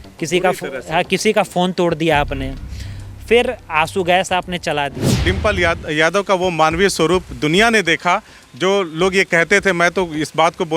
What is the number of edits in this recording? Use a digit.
1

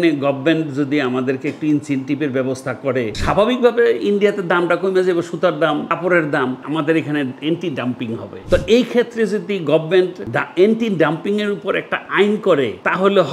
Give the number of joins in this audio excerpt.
2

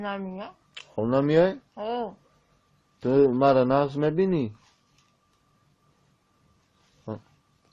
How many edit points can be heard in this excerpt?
1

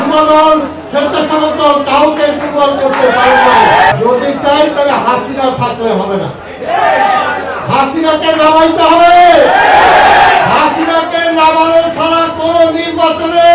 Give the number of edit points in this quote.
1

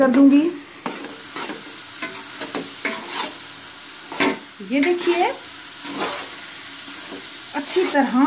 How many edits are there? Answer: 1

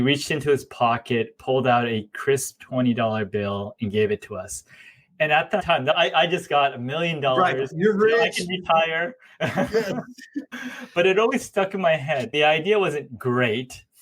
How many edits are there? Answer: 3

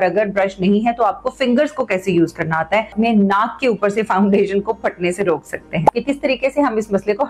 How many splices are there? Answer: 2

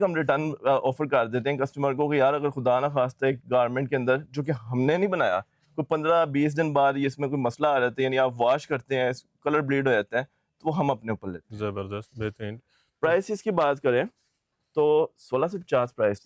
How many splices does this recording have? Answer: 0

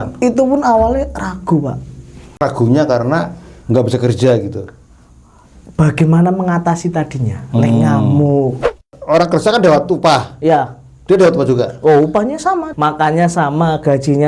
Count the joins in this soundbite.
3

